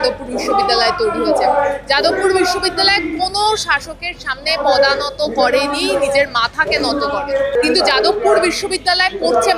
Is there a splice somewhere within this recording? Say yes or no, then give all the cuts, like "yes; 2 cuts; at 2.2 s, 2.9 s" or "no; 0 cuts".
yes; 1 cut; at 7.5 s